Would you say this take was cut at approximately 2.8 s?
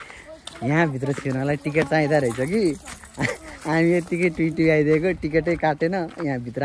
no; 0 cuts

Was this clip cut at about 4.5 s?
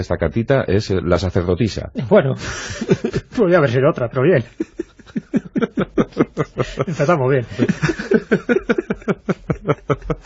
yes; 1 cut; at 4.5 s

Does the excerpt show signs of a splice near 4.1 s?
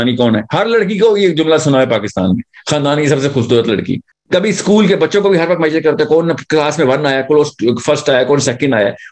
yes; 1 cut; at 4.1 s

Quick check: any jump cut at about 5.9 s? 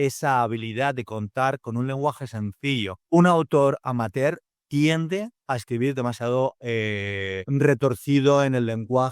no; 2 cuts; at 3.0 s, 7.4 s

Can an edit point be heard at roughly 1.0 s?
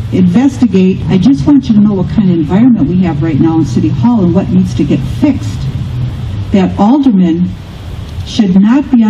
yes; 1 cut; at 1.0 s

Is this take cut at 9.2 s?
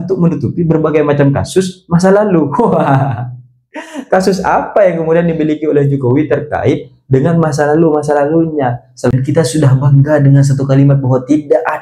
yes; 1 cut; at 9.2 s

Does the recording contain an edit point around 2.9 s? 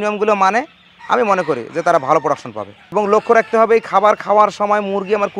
yes; 1 cut; at 2.9 s

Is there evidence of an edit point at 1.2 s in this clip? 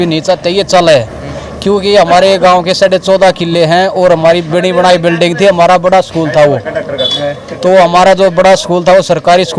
no; 0 cuts

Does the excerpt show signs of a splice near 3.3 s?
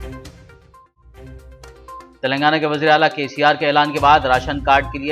no; 1 cut; at 1.8 s

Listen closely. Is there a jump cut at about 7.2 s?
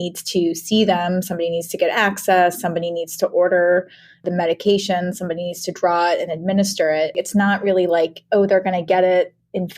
yes; 2 cuts; at 4.2 s, 7.2 s

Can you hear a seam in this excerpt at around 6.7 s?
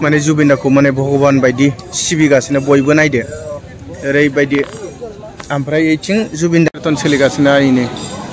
yes; 1 cut; at 6.7 s

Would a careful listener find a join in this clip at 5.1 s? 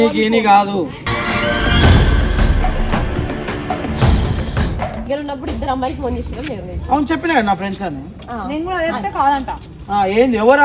yes; 1 cut; at 5.1 s

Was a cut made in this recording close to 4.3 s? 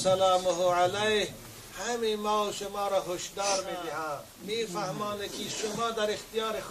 yes; 1 cut; at 4.3 s

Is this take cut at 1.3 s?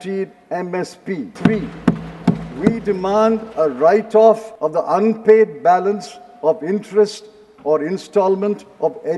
yes; 2 cuts; at 1.3 s, 4.5 s

